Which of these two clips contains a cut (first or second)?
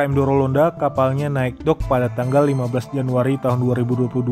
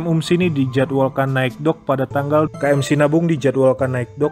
second